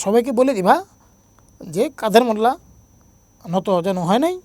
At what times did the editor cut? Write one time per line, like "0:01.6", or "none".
none